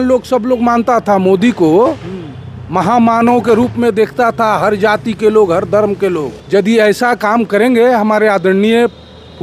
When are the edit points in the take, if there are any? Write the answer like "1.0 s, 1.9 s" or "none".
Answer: 6.4 s